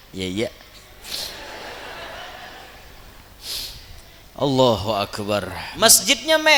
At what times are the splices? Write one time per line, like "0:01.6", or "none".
0:05.6